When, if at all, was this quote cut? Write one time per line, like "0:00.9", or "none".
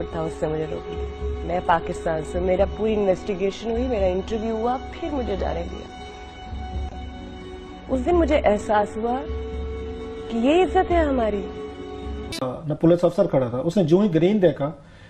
0:12.5